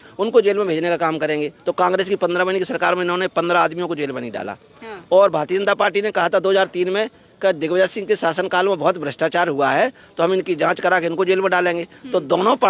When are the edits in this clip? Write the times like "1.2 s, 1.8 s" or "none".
none

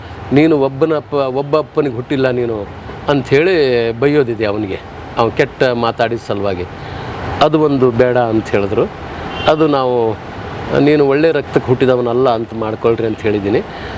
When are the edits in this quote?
none

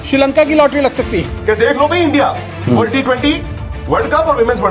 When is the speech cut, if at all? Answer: 1.2 s

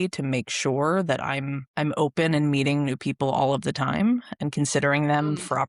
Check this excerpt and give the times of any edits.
1.6 s

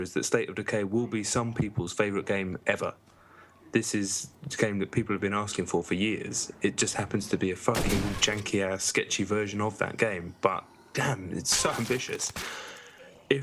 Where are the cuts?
none

